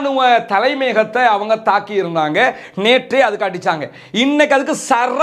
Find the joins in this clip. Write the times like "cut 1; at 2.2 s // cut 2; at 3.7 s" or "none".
none